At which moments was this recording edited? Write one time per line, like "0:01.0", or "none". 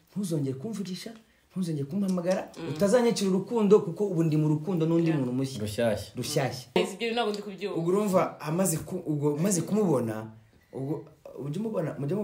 0:06.8